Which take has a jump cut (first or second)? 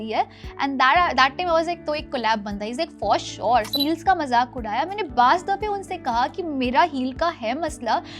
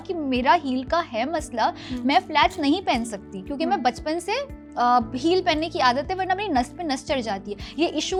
first